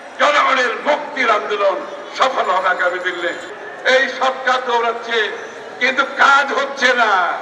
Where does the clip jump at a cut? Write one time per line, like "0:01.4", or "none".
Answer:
0:03.5